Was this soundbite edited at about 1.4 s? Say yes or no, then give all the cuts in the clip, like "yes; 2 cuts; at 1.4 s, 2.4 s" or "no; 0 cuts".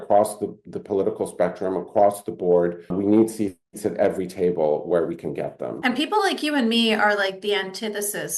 no; 2 cuts; at 2.9 s, 5.7 s